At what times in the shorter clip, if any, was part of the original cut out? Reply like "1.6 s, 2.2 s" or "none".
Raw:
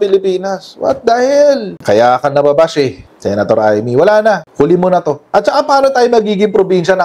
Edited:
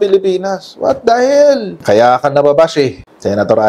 none